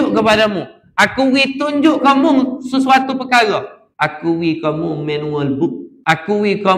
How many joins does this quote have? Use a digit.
2